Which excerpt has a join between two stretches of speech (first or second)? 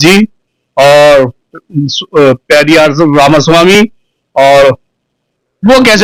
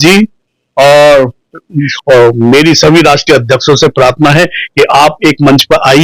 second